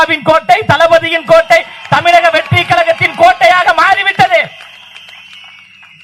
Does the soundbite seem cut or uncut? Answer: uncut